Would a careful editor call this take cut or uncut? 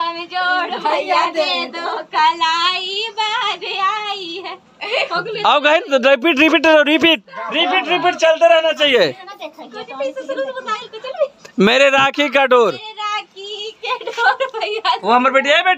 uncut